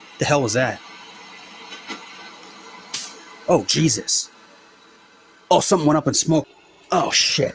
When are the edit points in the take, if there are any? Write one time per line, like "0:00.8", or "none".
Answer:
0:06.5